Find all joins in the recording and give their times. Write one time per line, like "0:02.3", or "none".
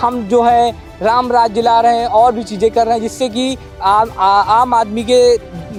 none